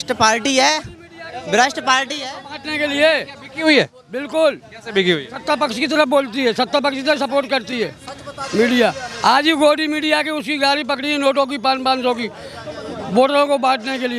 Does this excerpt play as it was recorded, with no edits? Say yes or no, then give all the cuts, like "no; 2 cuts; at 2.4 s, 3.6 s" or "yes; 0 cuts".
yes; 0 cuts